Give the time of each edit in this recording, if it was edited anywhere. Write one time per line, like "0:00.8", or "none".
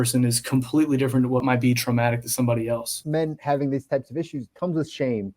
0:01.4
0:03.0
0:04.4

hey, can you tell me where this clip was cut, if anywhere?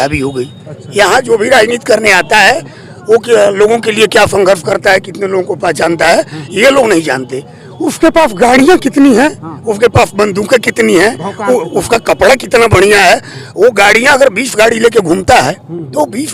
none

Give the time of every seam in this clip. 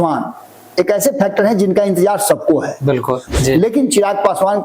0:03.3

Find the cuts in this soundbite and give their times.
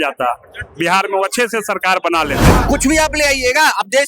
0:02.5

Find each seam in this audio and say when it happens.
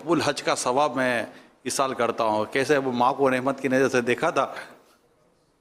none

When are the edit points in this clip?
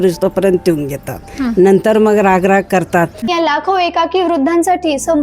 0:03.3

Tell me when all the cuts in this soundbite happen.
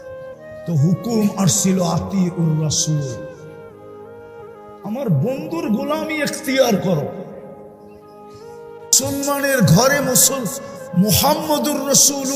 none

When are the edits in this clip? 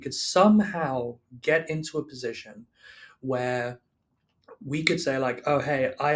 none

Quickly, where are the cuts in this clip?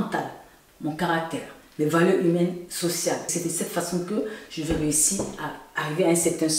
0:03.3

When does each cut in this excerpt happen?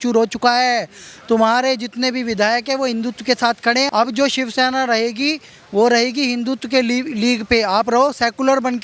0:03.9

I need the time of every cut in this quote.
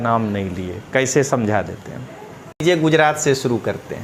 0:02.6

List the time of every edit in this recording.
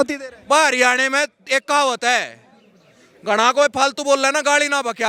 none

